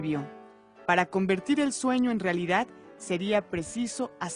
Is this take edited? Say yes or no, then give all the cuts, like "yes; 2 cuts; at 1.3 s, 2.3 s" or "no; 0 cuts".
yes; 1 cut; at 3.1 s